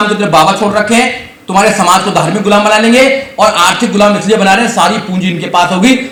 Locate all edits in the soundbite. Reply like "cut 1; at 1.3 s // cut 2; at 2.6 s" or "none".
none